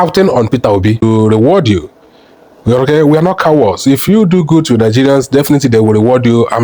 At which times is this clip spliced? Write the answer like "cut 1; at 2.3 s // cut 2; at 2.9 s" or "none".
cut 1; at 1.0 s

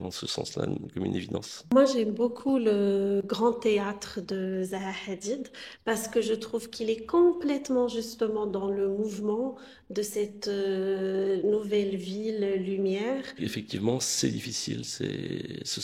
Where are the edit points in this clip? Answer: cut 1; at 1.6 s // cut 2; at 13.4 s

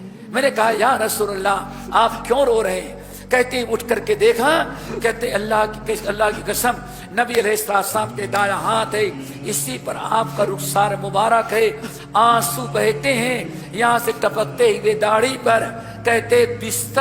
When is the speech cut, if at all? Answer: none

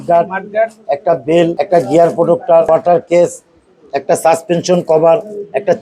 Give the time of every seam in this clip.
cut 1; at 1.6 s // cut 2; at 2.7 s

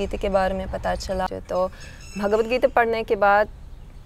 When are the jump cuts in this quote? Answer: cut 1; at 1.3 s

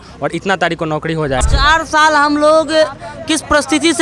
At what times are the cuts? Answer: cut 1; at 1.4 s

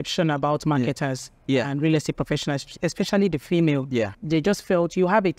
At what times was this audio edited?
cut 1; at 4.2 s

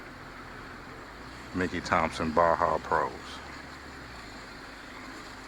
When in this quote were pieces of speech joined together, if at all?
none

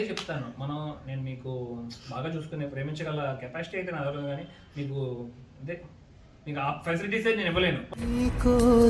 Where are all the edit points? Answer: cut 1; at 7.9 s

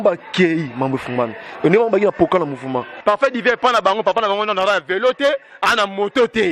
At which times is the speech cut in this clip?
cut 1; at 2.9 s

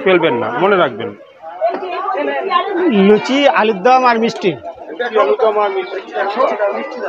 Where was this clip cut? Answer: none

